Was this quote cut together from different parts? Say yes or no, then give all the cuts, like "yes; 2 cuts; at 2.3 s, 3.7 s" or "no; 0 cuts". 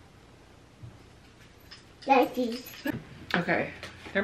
yes; 1 cut; at 2.9 s